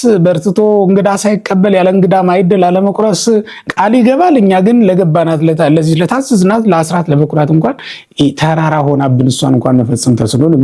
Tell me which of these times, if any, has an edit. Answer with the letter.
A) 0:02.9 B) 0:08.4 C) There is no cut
C